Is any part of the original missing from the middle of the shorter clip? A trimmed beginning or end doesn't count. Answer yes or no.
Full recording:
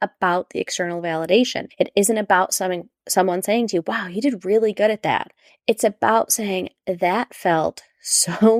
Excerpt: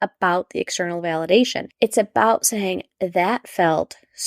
yes